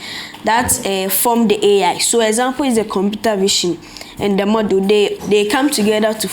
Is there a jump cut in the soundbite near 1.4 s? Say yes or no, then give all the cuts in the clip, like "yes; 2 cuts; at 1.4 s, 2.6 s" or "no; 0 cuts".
no; 1 cut; at 5.2 s